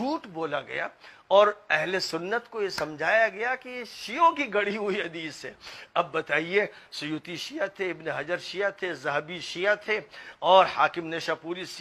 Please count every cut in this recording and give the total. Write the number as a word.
zero